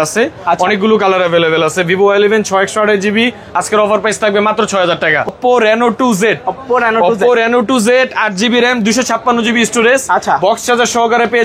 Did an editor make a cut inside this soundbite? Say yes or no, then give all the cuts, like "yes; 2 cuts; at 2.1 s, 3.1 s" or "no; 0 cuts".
yes; 1 cut; at 5.3 s